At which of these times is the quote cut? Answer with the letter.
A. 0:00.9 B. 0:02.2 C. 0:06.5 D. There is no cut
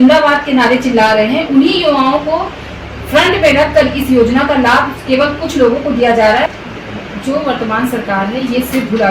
C